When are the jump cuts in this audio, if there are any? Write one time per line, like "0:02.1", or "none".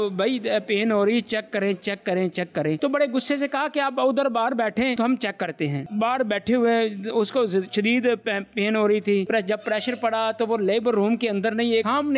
none